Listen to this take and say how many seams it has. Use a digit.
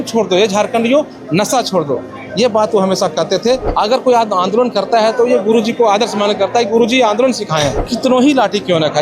2